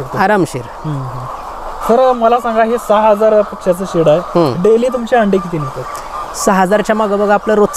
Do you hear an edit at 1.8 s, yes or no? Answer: yes